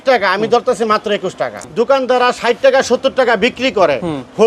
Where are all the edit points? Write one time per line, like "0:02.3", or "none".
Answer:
0:01.5